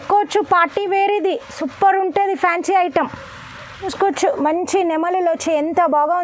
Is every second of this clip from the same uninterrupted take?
no; 1 cut; at 3.9 s

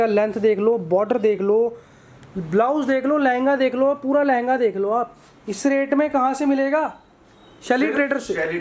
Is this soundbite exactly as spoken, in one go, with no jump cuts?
yes; 0 cuts

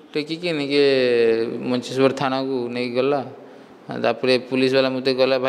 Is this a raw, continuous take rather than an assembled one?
yes; 0 cuts

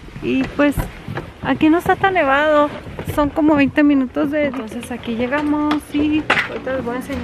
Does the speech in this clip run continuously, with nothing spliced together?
no; 1 cut; at 4.7 s

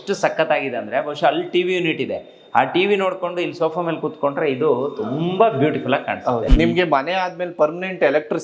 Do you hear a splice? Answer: yes; 1 cut; at 6.5 s

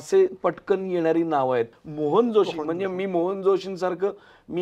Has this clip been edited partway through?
yes; 1 cut; at 1.7 s

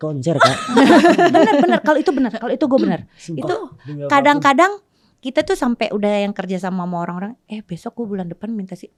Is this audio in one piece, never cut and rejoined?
yes; 0 cuts

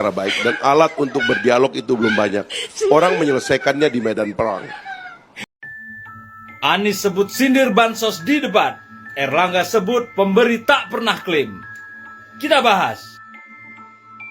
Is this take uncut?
no; 1 cut; at 5.3 s

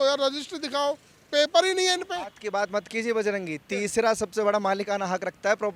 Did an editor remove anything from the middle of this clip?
no; 0 cuts

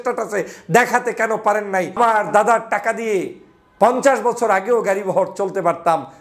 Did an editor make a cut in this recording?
yes; 1 cut; at 2.0 s

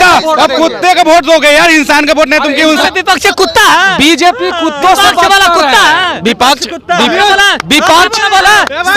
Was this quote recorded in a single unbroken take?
no; 1 cut; at 2.8 s

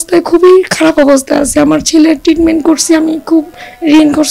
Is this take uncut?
yes; 0 cuts

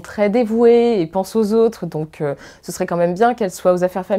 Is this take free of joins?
yes; 0 cuts

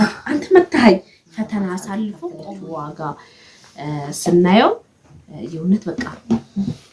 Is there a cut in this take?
yes; 1 cut; at 2.4 s

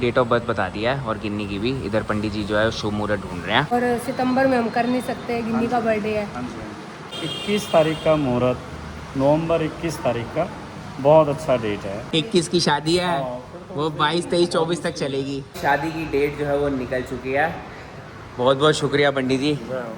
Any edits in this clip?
yes; 4 cuts; at 3.7 s, 7.1 s, 12.0 s, 15.6 s

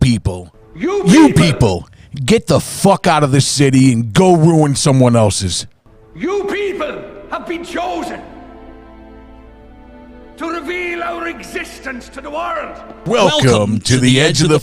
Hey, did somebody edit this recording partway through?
yes; 1 cut; at 13.4 s

